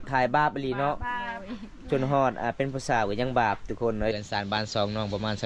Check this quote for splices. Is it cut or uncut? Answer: cut